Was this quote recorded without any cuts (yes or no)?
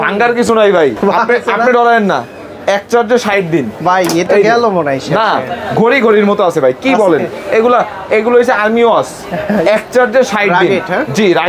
yes